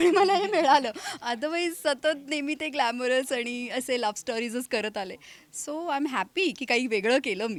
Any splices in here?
no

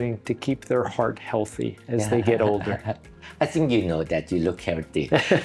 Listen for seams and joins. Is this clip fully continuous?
yes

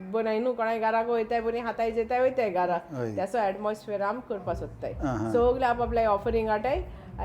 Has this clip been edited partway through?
no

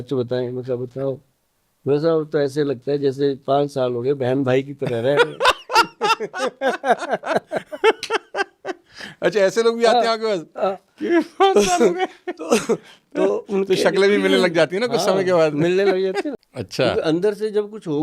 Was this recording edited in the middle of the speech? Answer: yes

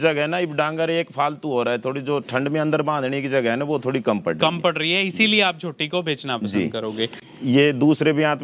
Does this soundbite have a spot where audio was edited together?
yes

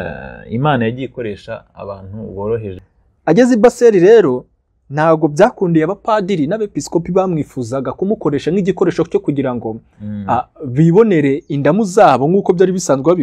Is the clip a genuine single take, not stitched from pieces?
no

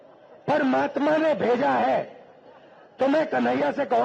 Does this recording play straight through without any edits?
yes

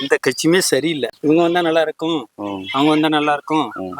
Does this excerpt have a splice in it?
yes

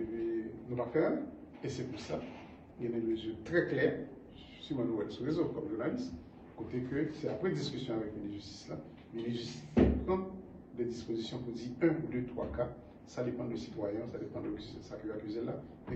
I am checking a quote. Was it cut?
no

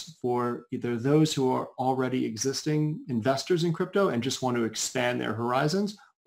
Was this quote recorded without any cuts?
yes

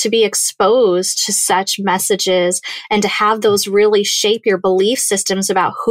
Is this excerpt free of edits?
yes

